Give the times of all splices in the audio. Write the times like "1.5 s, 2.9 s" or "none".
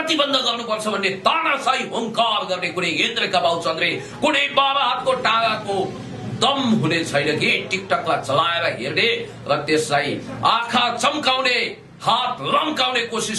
none